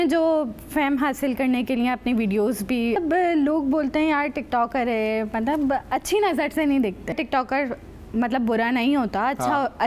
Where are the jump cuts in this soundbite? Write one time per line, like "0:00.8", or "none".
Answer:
0:03.0
0:07.2